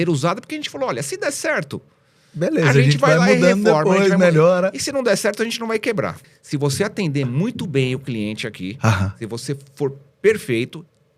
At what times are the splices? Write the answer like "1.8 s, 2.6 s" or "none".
6.2 s

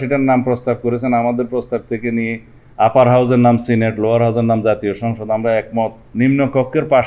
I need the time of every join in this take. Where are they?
6.0 s

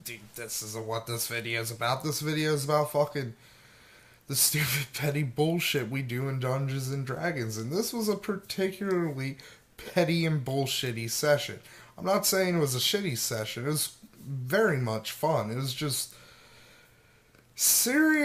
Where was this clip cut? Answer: 14.8 s

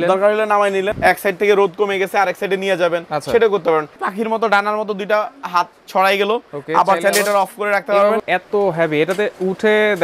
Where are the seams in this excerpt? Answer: 0.9 s, 4.0 s, 8.2 s

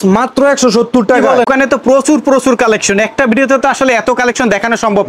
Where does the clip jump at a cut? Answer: 1.5 s

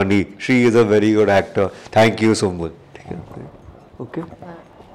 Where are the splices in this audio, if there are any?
none

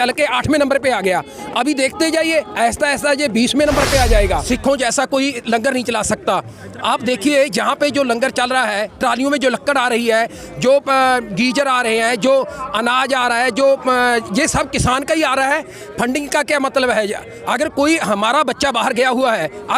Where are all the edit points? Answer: 4.4 s

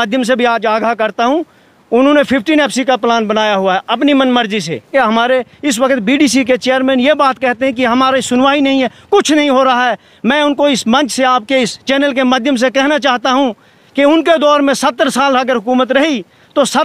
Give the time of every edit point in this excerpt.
4.9 s

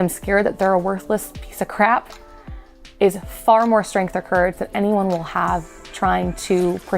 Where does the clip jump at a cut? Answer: 5.8 s

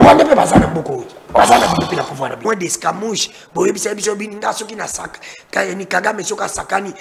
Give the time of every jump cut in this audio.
2.3 s

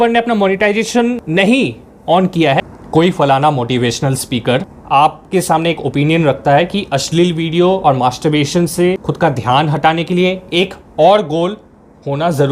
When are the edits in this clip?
1.2 s, 2.6 s, 4.8 s, 9.1 s

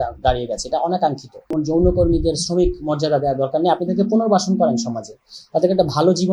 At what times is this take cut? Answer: 1.5 s

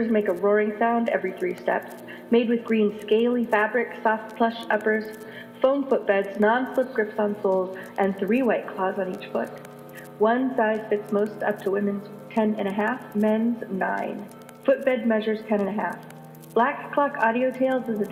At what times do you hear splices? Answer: none

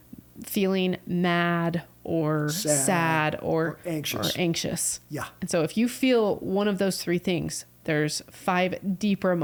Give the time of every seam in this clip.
none

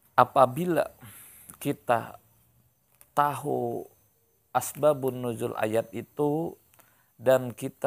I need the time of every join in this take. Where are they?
none

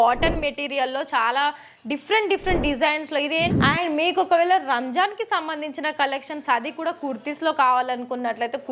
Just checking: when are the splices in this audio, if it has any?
3.5 s

